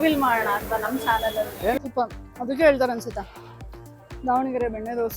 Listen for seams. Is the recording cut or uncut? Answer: cut